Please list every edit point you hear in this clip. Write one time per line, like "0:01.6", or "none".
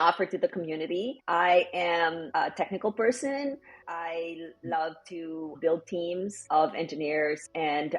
0:01.2
0:02.2
0:03.8
0:05.5
0:06.4